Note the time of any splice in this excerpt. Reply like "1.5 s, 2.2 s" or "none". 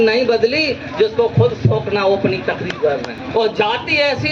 3.2 s